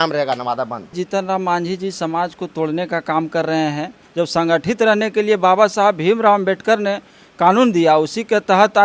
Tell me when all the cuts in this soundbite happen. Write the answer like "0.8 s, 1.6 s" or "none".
0.9 s, 4.0 s